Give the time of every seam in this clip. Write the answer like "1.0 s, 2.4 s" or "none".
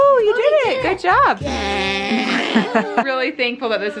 1.4 s, 3.1 s